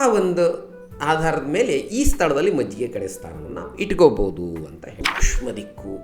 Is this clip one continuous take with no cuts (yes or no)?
no